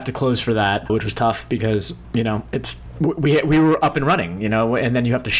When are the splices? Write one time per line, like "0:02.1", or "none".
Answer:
0:00.8
0:02.0
0:02.8